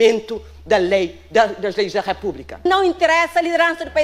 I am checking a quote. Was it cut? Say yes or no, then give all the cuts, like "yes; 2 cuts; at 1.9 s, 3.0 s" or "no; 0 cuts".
yes; 1 cut; at 2.6 s